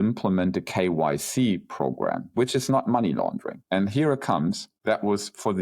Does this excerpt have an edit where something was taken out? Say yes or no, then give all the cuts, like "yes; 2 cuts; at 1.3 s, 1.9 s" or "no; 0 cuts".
yes; 1 cut; at 3.6 s